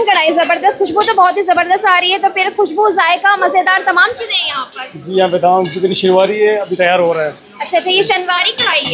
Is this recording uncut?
yes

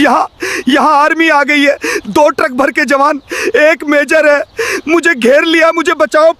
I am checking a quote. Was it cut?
no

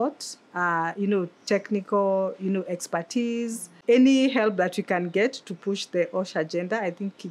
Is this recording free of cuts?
no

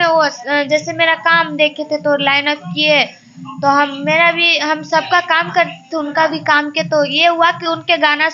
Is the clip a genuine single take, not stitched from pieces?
yes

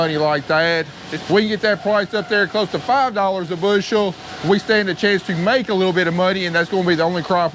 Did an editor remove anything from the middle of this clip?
yes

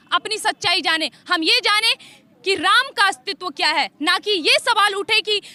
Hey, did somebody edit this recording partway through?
no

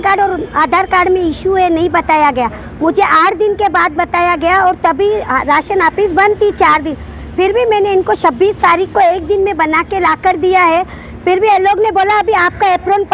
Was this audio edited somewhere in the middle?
no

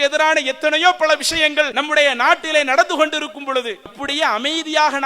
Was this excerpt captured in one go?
no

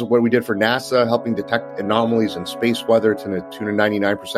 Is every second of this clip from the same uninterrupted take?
yes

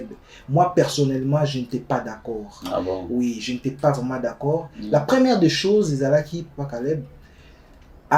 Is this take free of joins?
yes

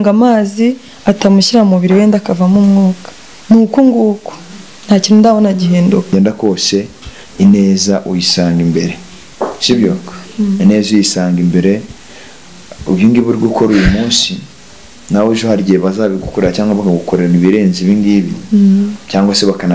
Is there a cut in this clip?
yes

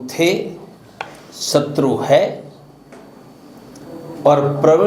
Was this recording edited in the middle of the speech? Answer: no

